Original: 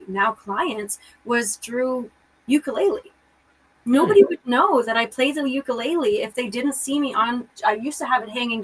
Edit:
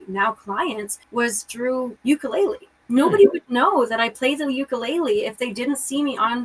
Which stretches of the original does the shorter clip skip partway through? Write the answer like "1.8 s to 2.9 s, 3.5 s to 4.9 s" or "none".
0.9 s to 1.1 s, 2.1 s to 2.4 s, 3.1 s to 3.7 s